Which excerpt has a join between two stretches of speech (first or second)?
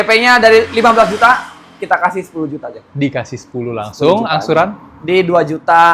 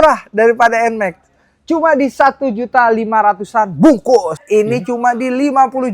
second